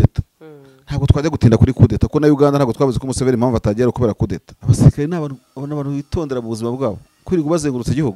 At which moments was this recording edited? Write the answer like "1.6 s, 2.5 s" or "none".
4.5 s